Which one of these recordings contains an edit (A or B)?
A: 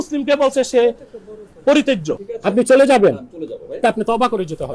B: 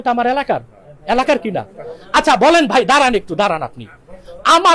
A